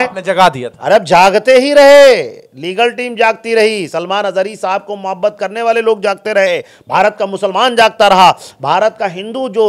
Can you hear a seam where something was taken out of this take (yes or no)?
no